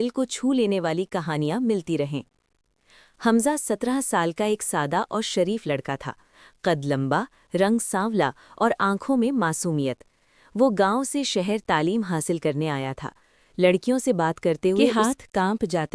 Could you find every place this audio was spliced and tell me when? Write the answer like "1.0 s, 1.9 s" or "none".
14.9 s